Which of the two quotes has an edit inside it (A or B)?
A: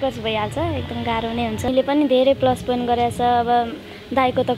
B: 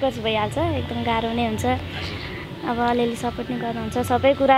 A